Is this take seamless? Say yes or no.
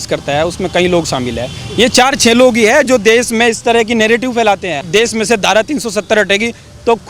no